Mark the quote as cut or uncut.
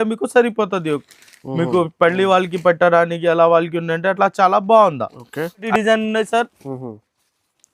cut